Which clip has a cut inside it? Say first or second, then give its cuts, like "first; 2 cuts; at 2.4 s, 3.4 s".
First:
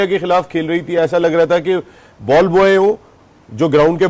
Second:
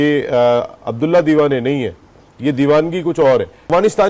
second; 1 cut; at 3.2 s